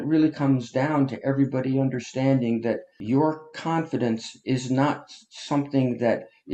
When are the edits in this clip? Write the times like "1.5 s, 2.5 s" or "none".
2.9 s